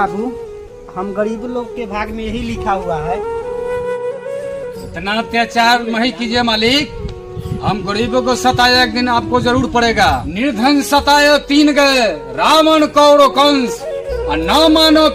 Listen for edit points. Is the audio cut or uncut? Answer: uncut